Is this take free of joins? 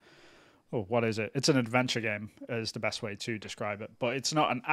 yes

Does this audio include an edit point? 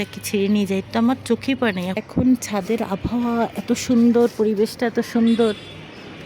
yes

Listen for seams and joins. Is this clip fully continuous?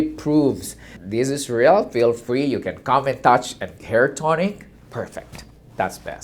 no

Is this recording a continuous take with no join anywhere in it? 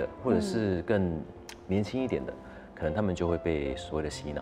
yes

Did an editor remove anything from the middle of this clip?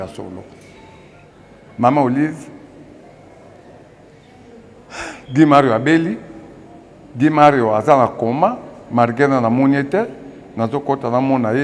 no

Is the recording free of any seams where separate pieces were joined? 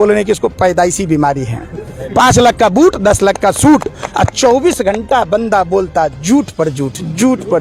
yes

